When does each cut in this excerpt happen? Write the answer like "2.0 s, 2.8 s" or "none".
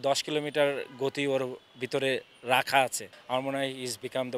3.1 s